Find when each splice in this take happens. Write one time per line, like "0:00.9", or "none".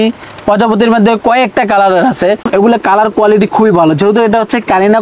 0:02.5